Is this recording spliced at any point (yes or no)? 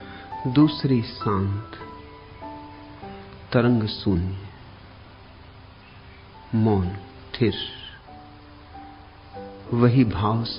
no